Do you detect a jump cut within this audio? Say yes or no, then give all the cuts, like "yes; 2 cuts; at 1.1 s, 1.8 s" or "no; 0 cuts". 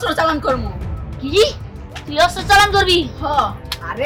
no; 0 cuts